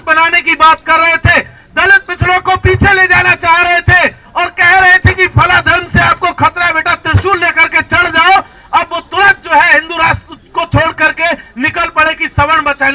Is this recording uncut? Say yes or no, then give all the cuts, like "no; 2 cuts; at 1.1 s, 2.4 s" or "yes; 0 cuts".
yes; 0 cuts